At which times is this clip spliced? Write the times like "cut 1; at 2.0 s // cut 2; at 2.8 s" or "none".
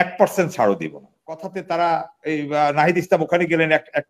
cut 1; at 1.4 s